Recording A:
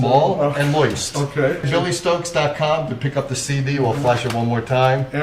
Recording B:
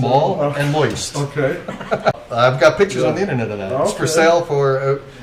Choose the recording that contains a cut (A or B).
A